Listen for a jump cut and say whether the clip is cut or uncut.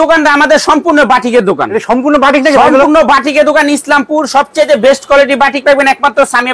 uncut